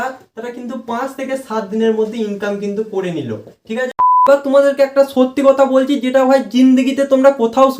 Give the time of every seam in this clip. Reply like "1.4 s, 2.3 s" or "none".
4.3 s